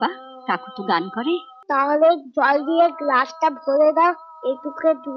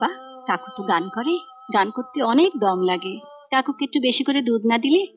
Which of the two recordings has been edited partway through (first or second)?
first